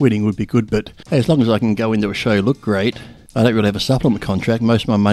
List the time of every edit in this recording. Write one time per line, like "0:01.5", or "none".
0:01.0